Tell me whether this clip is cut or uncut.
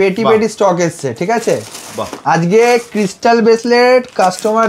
uncut